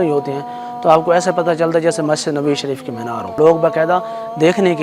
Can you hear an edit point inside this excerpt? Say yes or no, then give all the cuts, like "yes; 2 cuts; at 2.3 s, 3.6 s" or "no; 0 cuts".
yes; 1 cut; at 3.3 s